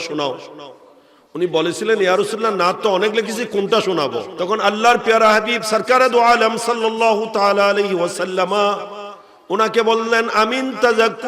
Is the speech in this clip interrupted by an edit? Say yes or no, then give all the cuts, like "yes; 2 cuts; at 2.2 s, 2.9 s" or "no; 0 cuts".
yes; 1 cut; at 4.3 s